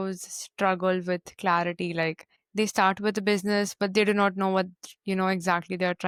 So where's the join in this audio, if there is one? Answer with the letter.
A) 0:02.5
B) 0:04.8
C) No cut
C